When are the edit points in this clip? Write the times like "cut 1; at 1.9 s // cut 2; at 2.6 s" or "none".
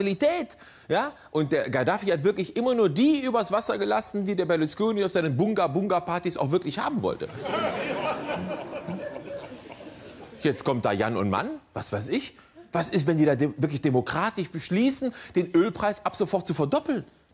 cut 1; at 13.1 s

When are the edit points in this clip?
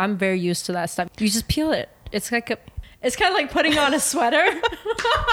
cut 1; at 1.1 s // cut 2; at 2.7 s

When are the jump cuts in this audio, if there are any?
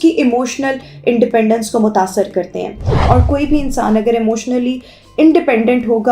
cut 1; at 2.8 s

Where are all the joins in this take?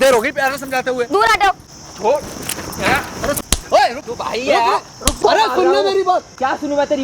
cut 1; at 1.7 s // cut 2; at 3.5 s // cut 3; at 5.0 s

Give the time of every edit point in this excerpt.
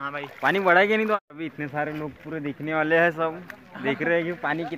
cut 1; at 1.2 s

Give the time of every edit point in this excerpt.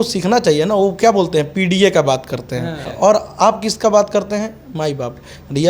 cut 1; at 2.9 s

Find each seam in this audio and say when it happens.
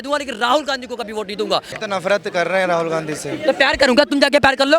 cut 1; at 1.7 s

